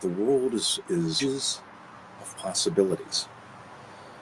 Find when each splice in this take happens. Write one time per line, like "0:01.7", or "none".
0:01.2

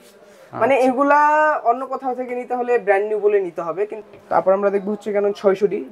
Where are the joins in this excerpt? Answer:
0:03.9

